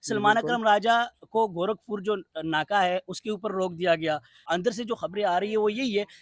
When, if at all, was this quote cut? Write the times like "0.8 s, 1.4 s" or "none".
4.4 s

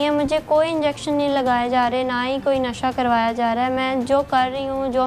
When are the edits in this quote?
none

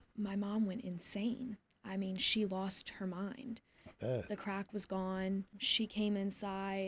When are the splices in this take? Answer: 5.6 s

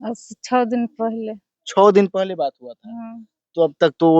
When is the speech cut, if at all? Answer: none

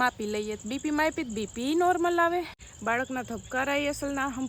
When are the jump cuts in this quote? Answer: 2.6 s

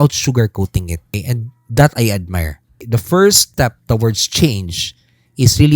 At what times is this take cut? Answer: 1.1 s, 2.8 s, 3.4 s

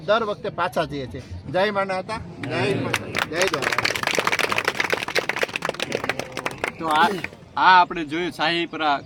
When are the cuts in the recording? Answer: none

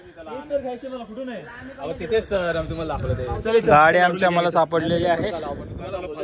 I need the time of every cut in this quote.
none

